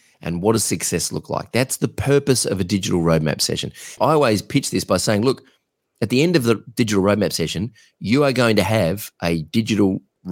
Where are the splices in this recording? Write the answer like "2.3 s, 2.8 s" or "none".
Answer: 4.0 s